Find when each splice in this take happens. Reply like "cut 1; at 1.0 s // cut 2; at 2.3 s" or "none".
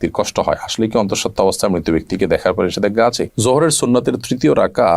cut 1; at 3.3 s